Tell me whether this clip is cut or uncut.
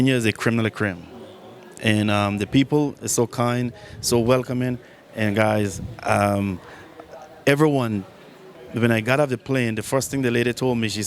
uncut